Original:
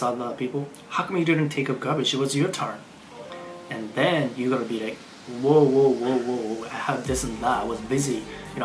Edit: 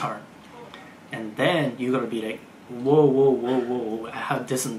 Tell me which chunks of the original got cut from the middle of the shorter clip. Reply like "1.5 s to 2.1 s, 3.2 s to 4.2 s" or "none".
none